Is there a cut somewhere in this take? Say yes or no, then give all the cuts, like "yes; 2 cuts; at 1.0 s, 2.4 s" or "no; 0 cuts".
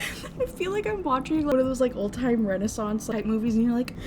yes; 2 cuts; at 1.5 s, 3.1 s